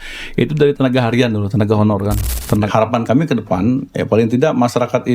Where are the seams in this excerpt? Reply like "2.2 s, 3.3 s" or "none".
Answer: 2.7 s